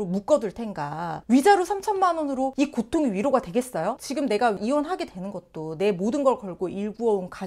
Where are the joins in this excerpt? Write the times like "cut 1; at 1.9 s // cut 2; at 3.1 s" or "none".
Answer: cut 1; at 4.0 s